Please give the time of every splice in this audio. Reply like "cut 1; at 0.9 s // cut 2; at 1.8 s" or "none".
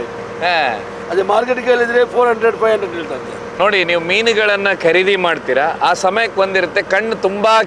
cut 1; at 3.5 s